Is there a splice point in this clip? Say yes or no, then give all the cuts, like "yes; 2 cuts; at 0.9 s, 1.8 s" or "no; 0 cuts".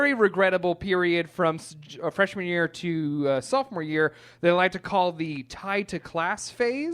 no; 0 cuts